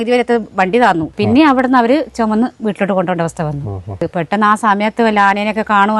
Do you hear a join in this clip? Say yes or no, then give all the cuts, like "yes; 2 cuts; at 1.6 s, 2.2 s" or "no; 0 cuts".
yes; 2 cuts; at 1.1 s, 4.0 s